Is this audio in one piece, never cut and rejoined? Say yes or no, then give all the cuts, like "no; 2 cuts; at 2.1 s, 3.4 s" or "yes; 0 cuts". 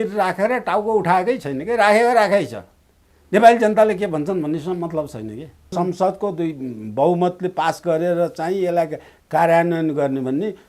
no; 1 cut; at 5.7 s